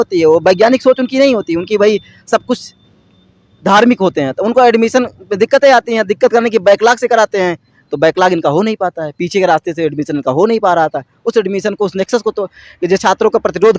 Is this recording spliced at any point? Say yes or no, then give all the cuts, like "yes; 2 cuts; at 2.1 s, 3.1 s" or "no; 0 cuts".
no; 0 cuts